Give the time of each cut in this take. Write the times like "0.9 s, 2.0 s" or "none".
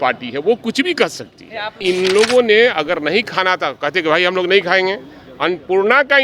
1.7 s